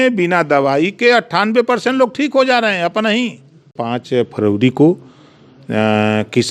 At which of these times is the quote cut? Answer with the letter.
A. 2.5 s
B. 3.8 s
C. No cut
B